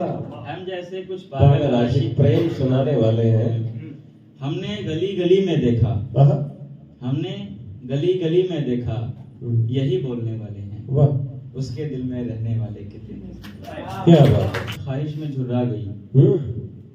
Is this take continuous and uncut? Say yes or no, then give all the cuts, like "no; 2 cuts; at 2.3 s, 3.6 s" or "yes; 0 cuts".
no; 1 cut; at 14.7 s